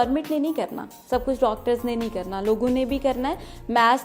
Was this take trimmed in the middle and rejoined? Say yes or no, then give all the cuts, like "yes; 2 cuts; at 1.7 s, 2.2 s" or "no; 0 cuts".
no; 0 cuts